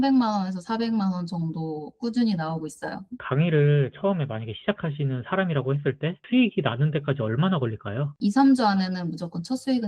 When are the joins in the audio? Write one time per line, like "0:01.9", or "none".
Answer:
0:03.2
0:06.2
0:08.1